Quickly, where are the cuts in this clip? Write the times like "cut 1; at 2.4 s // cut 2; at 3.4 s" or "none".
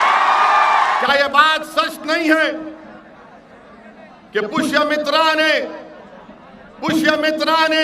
cut 1; at 1.0 s

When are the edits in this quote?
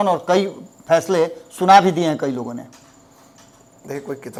none

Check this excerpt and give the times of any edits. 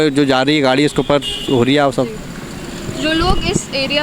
none

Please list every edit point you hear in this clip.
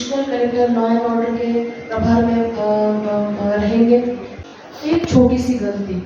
cut 1; at 4.4 s

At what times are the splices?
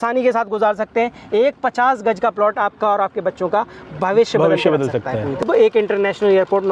cut 1; at 5.4 s

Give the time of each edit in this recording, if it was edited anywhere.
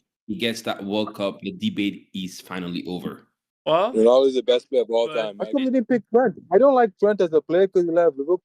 cut 1; at 5.4 s

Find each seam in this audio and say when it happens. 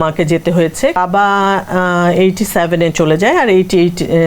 cut 1; at 0.9 s

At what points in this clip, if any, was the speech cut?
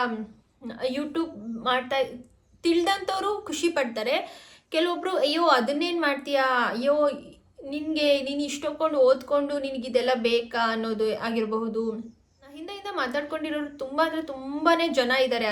cut 1; at 12.7 s

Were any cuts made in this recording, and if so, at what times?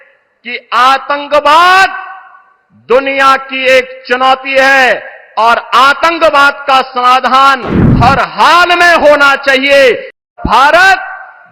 cut 1; at 10.3 s

